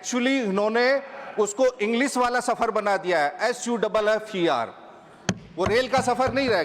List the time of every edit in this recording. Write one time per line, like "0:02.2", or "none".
none